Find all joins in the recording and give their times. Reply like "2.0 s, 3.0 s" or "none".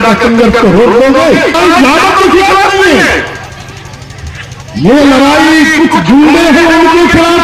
1.6 s